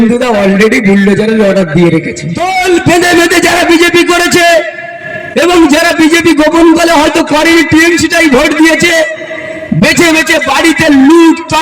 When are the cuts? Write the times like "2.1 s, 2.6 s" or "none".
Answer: 2.3 s